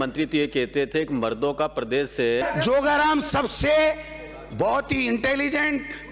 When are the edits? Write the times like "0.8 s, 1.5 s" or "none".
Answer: 2.4 s